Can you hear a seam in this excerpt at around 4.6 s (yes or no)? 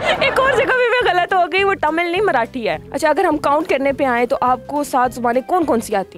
no